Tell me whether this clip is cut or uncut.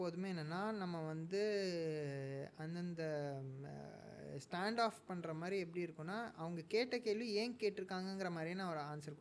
uncut